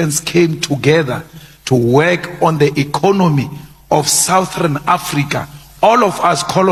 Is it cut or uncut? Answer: uncut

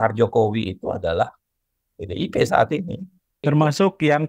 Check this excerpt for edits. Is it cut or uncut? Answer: cut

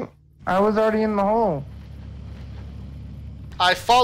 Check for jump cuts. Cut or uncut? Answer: uncut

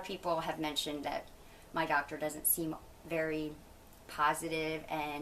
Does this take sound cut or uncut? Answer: uncut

